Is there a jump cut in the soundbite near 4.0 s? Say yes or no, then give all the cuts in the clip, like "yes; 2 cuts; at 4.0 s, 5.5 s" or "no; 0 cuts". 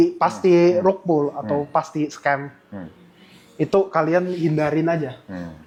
no; 0 cuts